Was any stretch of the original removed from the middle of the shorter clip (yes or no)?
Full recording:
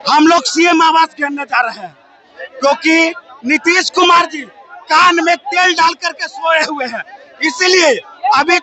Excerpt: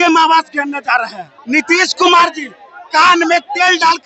yes